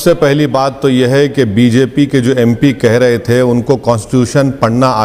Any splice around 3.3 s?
no; 0 cuts

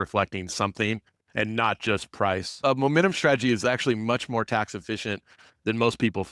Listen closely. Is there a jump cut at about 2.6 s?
yes; 1 cut; at 2.6 s

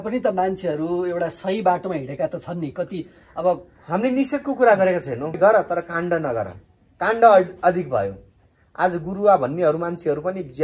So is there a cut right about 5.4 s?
yes; 1 cut; at 5.4 s

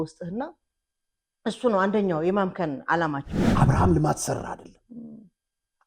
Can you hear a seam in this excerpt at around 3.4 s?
yes; 1 cut; at 3.4 s

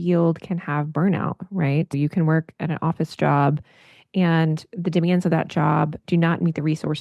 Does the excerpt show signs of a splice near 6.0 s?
yes; 2 cuts; at 2.0 s, 6.0 s

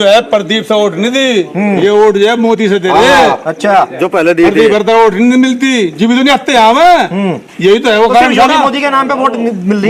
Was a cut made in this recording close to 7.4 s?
no; 0 cuts

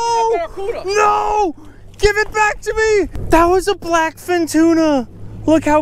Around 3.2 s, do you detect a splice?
yes; 1 cut; at 3.2 s

